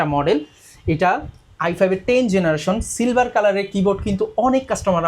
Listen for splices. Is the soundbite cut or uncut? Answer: uncut